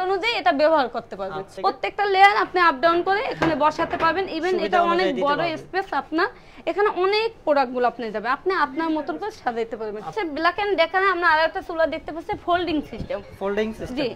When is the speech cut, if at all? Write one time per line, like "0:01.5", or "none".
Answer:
0:01.4
0:10.1